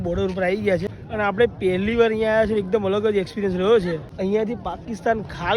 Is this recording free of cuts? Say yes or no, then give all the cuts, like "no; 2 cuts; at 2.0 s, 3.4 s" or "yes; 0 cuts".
no; 2 cuts; at 1.0 s, 4.1 s